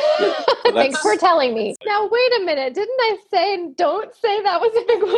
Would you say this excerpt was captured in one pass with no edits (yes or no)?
no